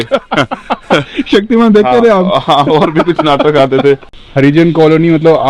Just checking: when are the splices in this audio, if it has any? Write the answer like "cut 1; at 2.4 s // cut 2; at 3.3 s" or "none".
cut 1; at 4.1 s